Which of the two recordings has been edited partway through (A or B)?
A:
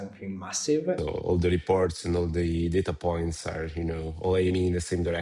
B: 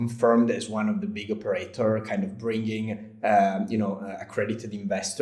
A